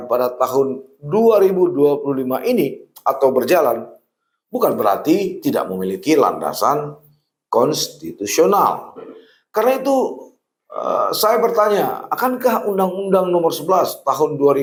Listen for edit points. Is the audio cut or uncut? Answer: uncut